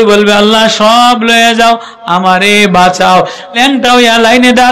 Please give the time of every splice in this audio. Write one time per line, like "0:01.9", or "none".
0:03.6